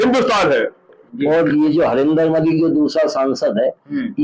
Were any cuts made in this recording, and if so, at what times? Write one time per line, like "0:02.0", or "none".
0:01.1